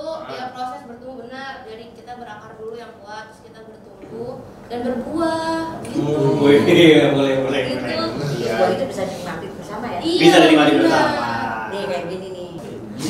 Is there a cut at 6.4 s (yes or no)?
no